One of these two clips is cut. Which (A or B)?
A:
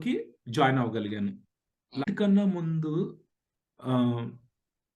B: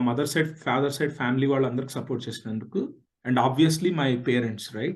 A